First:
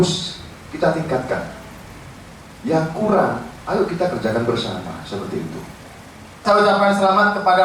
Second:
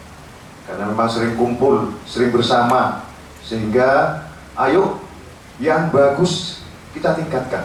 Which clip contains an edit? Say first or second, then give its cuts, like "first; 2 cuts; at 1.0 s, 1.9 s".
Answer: first; 1 cut; at 6.3 s